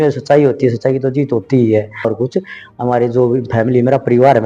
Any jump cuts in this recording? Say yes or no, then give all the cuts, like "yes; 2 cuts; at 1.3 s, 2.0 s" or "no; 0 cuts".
yes; 1 cut; at 2.1 s